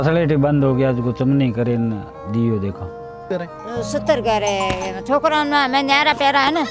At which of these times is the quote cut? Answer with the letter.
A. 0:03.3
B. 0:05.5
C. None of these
A